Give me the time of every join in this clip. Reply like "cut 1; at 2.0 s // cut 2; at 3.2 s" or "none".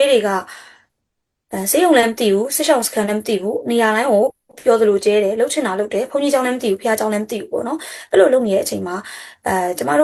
none